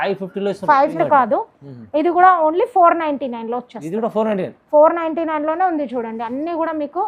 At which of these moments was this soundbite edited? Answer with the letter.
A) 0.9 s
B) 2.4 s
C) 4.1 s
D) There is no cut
A